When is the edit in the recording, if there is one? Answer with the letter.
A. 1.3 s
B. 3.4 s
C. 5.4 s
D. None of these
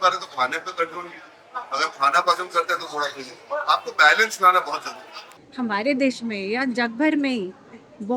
C